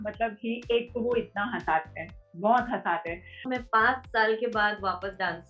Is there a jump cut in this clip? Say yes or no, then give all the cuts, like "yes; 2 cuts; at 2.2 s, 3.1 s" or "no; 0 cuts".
yes; 1 cut; at 3.4 s